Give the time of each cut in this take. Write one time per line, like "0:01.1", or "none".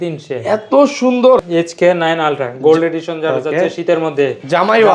0:01.4

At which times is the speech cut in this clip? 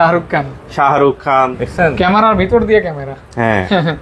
0:01.6

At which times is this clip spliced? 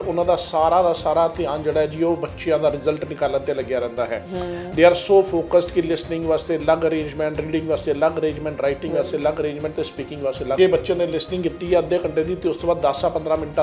0:10.6

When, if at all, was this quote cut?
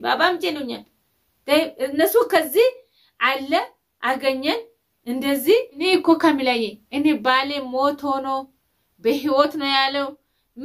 0:05.9

